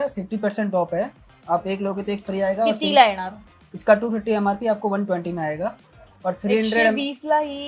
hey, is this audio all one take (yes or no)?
yes